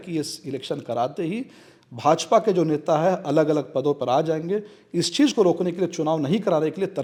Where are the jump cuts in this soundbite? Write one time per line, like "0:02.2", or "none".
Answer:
none